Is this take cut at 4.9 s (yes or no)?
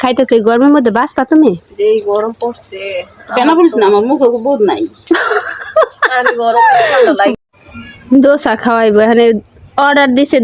no